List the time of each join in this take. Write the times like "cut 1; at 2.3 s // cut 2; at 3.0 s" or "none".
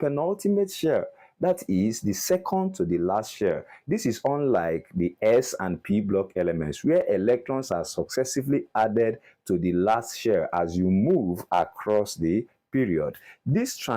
none